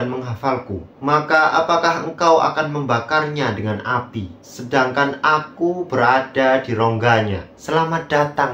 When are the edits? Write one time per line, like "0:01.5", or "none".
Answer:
0:07.5